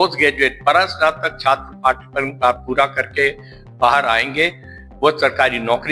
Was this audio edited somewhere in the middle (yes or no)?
no